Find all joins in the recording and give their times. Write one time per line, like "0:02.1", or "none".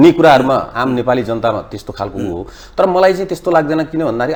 none